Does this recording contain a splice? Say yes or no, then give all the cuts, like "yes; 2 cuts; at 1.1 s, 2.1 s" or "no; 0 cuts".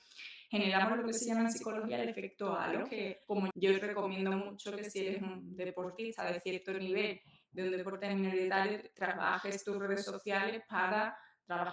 yes; 1 cut; at 3.5 s